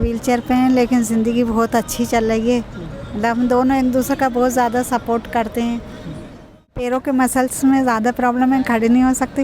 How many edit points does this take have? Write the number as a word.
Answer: one